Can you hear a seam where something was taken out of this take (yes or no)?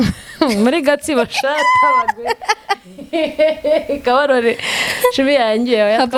no